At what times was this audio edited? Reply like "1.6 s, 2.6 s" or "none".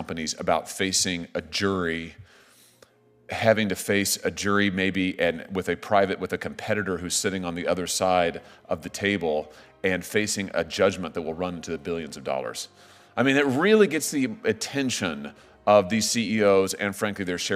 none